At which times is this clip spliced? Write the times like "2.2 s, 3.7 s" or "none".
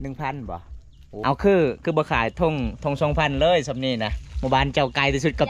1.2 s